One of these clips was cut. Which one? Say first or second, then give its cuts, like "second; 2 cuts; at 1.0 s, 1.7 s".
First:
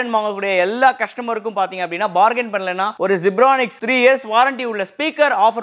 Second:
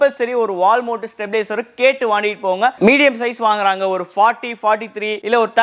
second; 1 cut; at 2.8 s